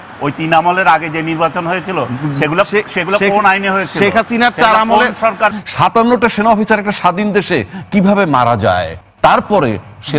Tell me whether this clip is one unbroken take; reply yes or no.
no